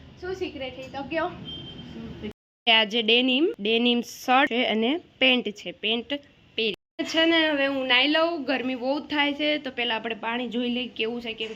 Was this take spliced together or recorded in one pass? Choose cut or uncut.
cut